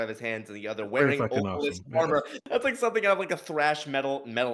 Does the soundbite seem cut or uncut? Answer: cut